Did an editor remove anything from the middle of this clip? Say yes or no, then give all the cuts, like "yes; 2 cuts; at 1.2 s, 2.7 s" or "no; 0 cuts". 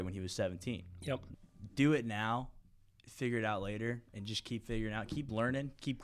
yes; 1 cut; at 1.3 s